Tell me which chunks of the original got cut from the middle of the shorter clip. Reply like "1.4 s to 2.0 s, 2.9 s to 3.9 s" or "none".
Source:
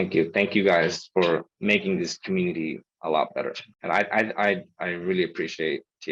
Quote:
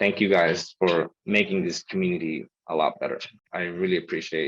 3.8 s to 4.7 s